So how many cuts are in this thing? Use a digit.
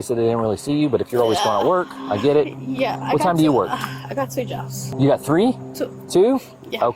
0